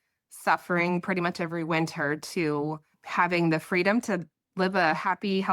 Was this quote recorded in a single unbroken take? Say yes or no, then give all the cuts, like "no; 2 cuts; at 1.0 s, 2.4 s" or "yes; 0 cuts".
no; 1 cut; at 3.0 s